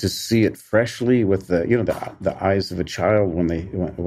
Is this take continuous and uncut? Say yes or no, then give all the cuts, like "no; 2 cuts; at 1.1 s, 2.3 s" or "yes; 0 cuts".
yes; 0 cuts